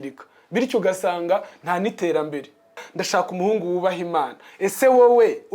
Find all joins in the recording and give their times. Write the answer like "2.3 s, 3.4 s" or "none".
2.9 s